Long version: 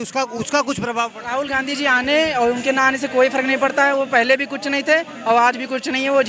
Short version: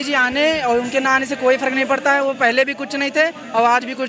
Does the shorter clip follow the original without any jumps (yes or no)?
yes